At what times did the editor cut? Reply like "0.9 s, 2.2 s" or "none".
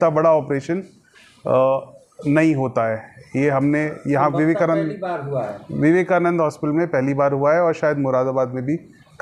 none